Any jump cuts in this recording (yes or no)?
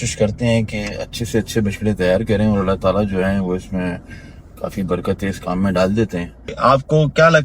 yes